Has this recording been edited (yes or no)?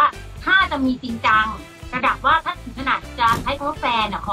no